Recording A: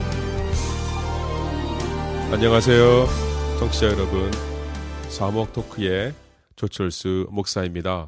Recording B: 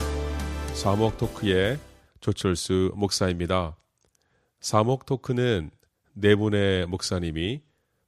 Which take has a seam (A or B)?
A